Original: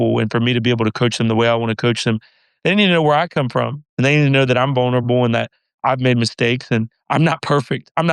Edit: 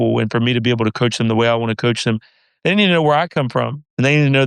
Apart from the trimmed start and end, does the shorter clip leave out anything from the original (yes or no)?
no